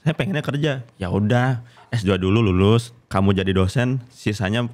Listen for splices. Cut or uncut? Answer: cut